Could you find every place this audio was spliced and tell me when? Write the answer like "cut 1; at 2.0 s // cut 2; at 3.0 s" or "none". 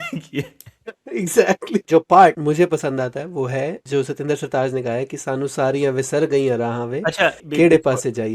cut 1; at 1.8 s // cut 2; at 2.4 s // cut 3; at 3.8 s // cut 4; at 7.4 s

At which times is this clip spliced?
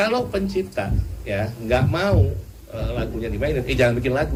none

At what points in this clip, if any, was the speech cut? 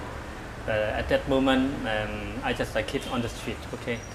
cut 1; at 3.1 s

